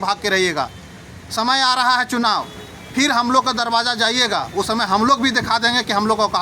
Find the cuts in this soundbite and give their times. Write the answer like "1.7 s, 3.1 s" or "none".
none